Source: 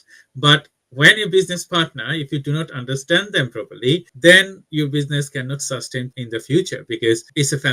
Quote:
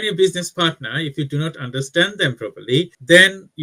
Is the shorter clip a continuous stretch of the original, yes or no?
yes